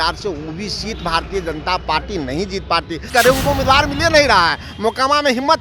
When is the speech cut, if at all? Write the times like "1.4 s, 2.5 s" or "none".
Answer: 3.1 s